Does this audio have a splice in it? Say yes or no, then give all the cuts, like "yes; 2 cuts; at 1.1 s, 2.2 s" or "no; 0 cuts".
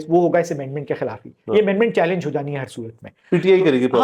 no; 0 cuts